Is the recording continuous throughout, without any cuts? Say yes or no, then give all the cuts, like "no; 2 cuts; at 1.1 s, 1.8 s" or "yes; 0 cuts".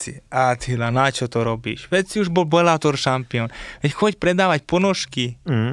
yes; 0 cuts